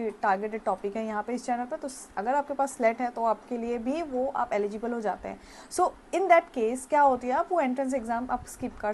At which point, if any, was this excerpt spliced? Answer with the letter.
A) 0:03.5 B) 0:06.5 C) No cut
C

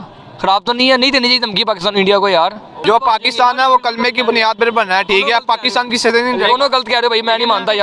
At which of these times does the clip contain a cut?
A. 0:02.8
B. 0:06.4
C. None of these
A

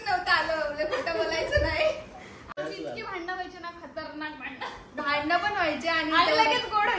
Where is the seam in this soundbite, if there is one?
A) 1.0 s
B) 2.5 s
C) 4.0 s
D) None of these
B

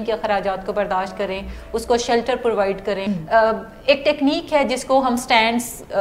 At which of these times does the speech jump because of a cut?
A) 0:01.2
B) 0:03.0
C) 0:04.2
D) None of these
B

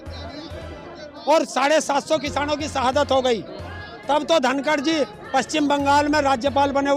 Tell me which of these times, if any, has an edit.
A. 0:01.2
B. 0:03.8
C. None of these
C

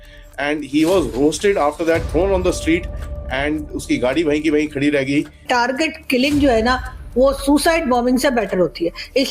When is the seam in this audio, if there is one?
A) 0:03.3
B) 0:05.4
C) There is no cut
B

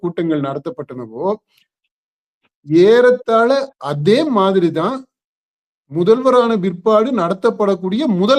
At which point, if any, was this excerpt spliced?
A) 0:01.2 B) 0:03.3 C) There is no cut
C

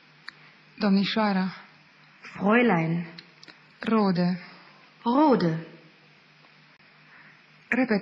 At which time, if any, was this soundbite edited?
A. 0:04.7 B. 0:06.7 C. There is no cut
B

